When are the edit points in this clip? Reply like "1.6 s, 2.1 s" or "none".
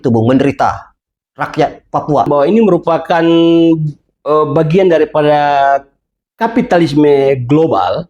2.3 s